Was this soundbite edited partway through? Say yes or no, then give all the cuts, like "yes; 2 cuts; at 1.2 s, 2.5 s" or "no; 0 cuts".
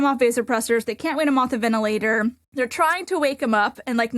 yes; 1 cut; at 2.4 s